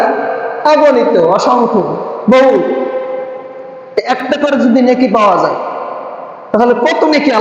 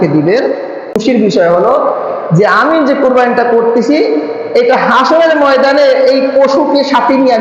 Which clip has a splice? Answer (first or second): second